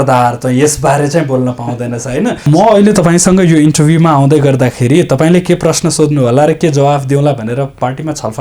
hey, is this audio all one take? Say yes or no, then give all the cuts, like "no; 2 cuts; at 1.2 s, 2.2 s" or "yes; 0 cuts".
no; 1 cut; at 2.5 s